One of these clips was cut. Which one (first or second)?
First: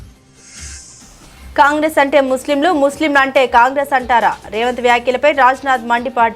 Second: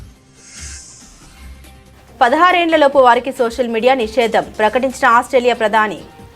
first